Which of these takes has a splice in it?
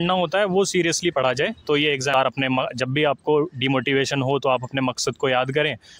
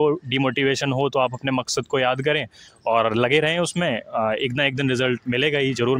first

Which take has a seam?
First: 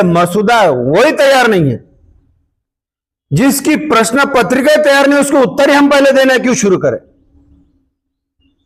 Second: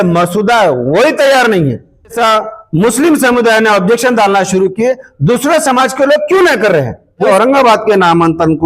second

